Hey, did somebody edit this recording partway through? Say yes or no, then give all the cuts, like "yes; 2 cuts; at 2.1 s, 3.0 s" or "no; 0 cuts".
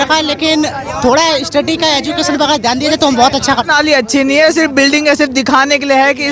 yes; 1 cut; at 3.6 s